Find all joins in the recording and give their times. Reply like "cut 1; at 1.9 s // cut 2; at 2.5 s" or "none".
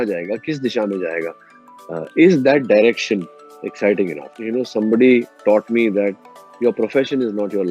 cut 1; at 4.2 s